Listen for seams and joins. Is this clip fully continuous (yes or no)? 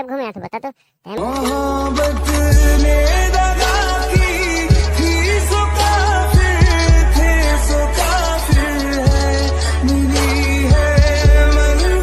no